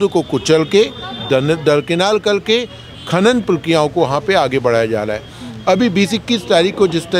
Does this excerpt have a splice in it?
no; 0 cuts

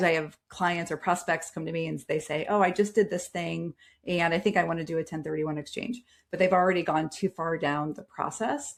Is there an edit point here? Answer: no; 0 cuts

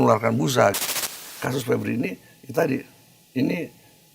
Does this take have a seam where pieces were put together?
yes; 1 cut; at 1.0 s

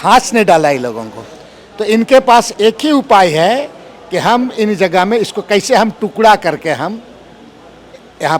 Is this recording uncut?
yes; 0 cuts

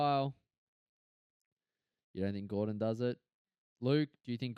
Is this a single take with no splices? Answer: yes; 0 cuts

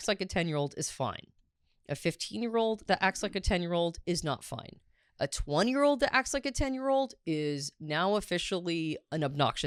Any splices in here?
no; 0 cuts

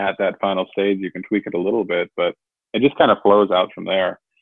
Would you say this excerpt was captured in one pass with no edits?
yes; 0 cuts

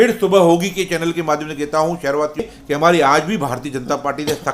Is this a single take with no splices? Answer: no; 1 cut; at 2.5 s

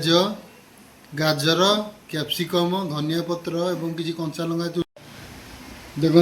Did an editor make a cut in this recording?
yes; 1 cut; at 4.8 s

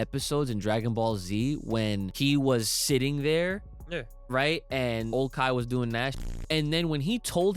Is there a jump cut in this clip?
yes; 3 cuts; at 2.1 s, 5.1 s, 6.2 s

